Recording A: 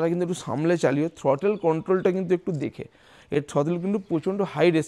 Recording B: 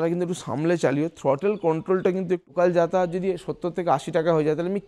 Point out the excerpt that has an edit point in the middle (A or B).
B